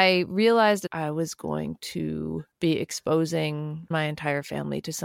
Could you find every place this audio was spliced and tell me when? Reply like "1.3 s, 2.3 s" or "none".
0.9 s, 2.5 s, 3.9 s

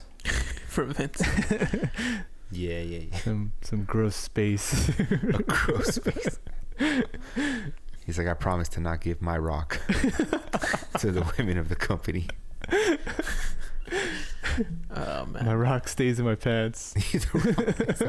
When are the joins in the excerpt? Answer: none

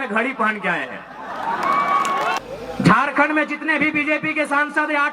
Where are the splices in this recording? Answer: 2.4 s

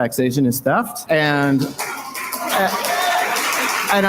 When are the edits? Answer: 1.0 s

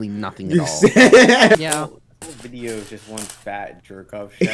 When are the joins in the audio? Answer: 1.6 s

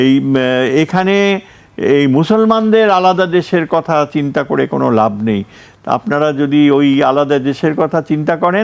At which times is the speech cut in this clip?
none

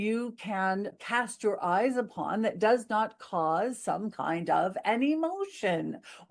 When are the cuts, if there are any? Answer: 0.9 s

